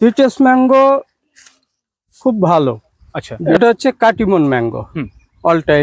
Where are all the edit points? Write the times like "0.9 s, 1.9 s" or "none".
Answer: 3.4 s